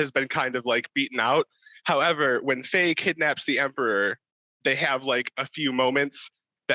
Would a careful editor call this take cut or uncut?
uncut